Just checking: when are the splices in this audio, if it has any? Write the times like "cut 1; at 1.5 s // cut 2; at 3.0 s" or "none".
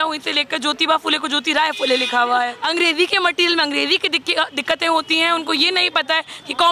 cut 1; at 2.6 s

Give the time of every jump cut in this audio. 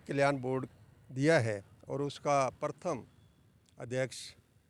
none

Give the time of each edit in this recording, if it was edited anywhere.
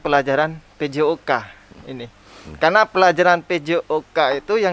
none

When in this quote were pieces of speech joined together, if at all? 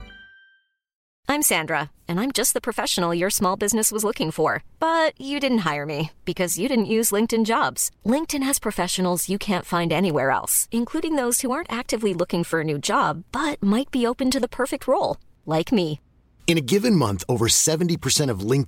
cut 1; at 1.1 s

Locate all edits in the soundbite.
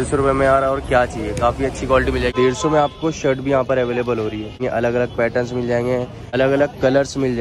cut 1; at 2.3 s // cut 2; at 4.6 s // cut 3; at 6.3 s

